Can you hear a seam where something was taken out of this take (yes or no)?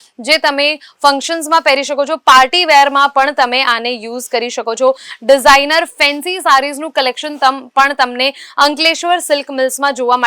no